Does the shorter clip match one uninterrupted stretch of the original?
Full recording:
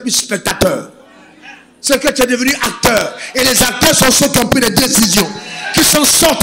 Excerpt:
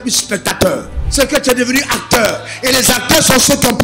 no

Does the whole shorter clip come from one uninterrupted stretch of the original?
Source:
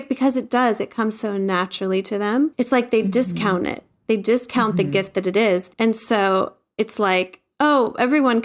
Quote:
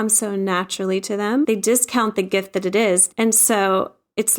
no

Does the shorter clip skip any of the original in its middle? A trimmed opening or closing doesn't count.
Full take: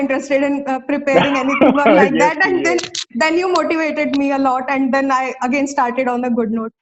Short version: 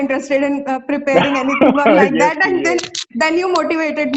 no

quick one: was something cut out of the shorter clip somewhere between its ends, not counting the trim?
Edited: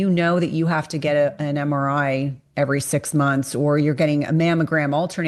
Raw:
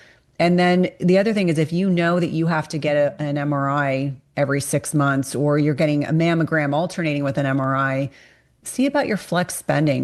no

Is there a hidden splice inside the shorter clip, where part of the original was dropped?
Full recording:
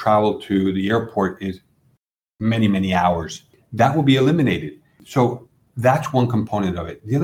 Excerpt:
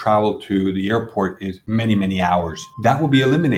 yes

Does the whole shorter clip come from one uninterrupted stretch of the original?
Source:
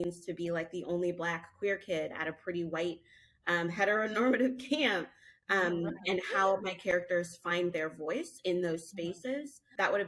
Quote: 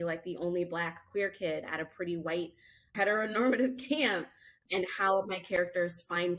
no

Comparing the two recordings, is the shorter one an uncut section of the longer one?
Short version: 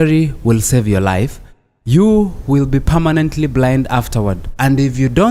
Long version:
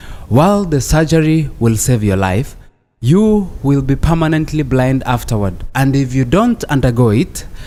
yes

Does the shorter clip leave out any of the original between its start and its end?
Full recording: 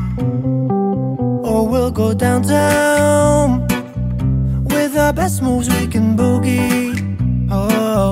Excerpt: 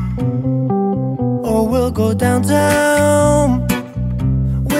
no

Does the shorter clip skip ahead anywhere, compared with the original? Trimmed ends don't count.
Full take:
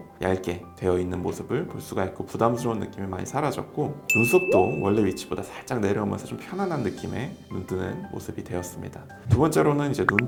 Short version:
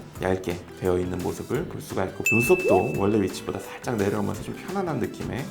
yes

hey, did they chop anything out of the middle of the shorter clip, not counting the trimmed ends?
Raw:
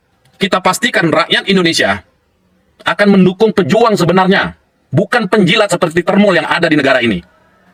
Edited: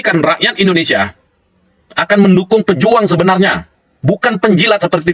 no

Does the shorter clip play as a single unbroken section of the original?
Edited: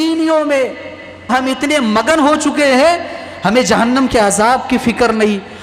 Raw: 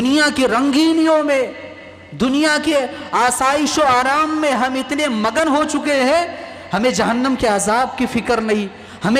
no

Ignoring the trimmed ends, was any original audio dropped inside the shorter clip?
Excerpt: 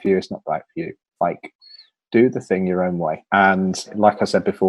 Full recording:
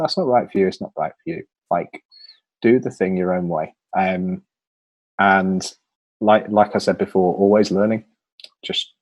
yes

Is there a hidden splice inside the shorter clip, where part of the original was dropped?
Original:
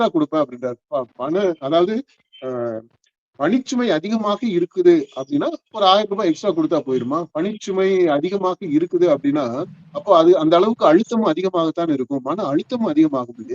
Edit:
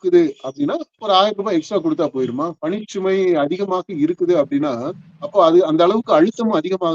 no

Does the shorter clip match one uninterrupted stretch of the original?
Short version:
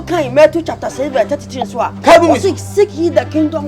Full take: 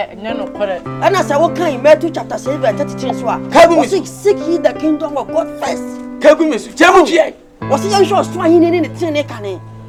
yes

